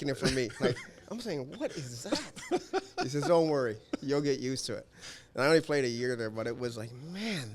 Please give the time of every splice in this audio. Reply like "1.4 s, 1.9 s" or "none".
none